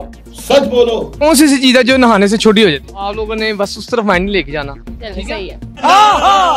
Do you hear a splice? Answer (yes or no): yes